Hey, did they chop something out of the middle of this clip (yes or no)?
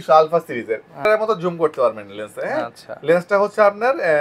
yes